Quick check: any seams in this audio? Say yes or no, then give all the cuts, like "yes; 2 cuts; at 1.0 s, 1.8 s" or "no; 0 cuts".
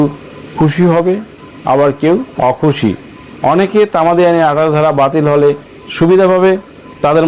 yes; 1 cut; at 2.3 s